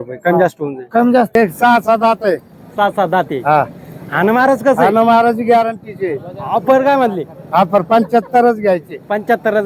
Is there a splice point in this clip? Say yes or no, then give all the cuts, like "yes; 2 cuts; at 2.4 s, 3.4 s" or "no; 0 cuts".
yes; 1 cut; at 1.3 s